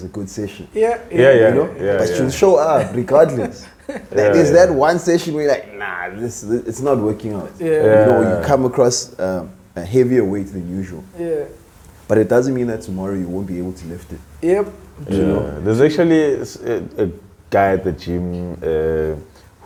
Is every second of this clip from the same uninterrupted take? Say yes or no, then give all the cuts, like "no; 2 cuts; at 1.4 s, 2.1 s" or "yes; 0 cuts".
yes; 0 cuts